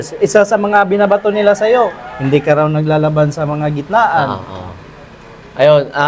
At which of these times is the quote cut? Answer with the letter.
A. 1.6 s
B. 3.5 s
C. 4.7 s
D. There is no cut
D